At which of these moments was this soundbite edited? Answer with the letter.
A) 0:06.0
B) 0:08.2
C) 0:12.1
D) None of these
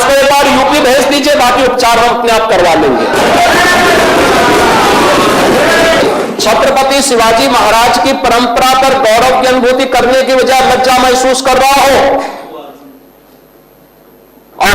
A